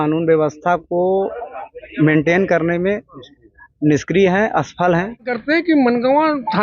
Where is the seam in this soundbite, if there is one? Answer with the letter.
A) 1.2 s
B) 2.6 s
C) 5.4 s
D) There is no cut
C